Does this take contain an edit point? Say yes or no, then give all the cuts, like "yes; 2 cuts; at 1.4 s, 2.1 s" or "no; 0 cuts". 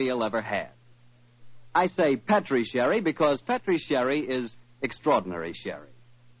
yes; 1 cut; at 2.7 s